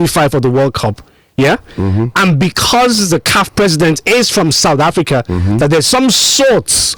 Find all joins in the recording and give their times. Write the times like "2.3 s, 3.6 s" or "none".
none